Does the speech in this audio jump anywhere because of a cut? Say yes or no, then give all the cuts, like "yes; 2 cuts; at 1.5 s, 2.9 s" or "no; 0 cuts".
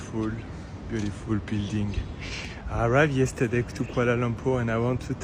no; 0 cuts